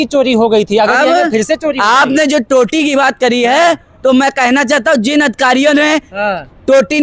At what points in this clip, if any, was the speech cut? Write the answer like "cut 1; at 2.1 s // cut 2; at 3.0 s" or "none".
none